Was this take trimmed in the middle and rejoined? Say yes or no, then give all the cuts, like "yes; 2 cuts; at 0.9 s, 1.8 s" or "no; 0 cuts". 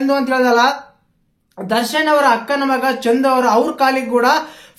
no; 0 cuts